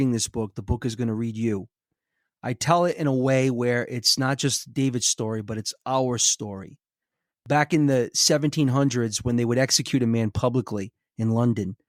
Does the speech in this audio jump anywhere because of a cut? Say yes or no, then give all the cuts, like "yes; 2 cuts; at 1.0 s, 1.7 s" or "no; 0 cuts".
no; 0 cuts